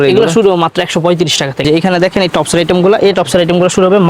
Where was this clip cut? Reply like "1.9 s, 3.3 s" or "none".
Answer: 1.6 s